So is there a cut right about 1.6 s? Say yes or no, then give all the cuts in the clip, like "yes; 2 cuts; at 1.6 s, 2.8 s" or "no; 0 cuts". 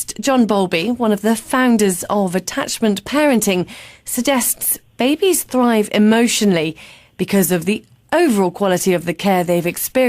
no; 1 cut; at 6.8 s